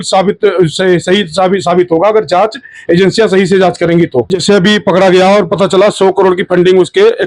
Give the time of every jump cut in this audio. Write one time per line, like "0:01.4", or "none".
0:04.3